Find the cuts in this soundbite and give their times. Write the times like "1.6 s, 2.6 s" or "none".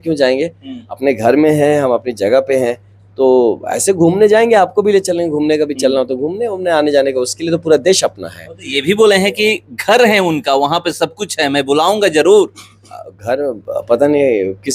none